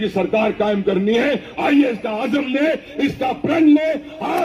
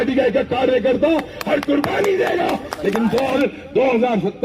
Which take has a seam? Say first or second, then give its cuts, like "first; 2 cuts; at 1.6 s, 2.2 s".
second; 1 cut; at 3.4 s